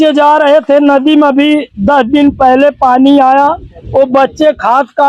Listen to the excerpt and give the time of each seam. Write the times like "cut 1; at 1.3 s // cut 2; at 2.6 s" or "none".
none